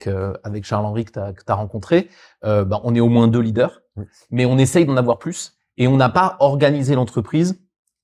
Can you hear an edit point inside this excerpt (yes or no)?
no